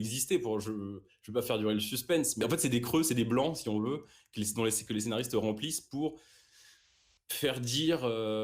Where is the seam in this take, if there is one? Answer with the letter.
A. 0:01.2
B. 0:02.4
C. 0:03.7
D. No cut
B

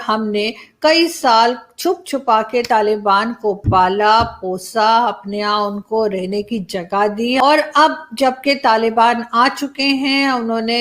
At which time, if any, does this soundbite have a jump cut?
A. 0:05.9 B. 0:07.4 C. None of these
B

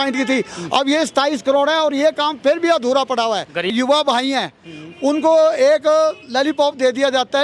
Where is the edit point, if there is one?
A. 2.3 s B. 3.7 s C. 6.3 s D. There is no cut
B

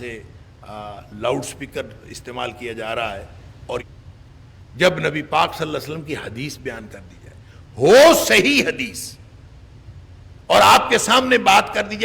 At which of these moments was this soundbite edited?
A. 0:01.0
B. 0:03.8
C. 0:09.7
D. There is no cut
B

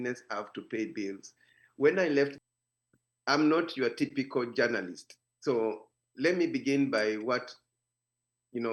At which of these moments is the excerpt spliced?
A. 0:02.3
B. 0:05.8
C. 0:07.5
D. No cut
A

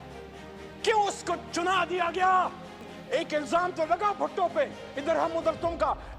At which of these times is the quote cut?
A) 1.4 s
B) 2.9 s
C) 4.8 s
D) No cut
B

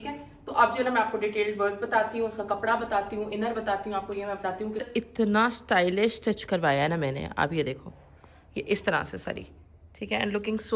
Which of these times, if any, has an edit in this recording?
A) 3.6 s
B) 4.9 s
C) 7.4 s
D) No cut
B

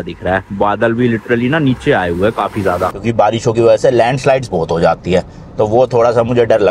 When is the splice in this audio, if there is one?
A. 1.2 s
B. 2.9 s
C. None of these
B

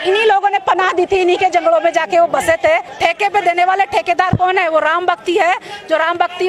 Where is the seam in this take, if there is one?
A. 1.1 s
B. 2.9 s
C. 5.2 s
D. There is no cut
B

